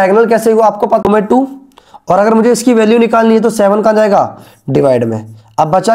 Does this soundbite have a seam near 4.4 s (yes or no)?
no